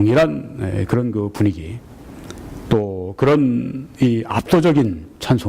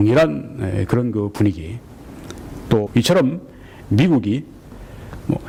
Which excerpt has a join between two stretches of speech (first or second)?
first